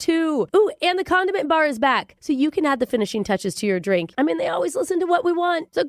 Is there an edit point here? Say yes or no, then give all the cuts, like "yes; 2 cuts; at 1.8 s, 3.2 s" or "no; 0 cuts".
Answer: yes; 1 cut; at 4.1 s